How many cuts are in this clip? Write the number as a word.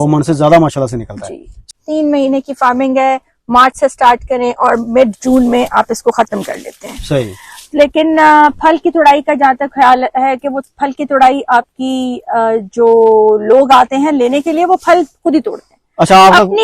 one